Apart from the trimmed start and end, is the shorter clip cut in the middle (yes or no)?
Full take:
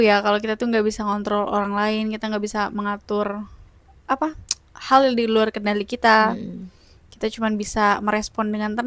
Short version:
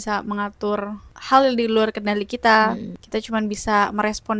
yes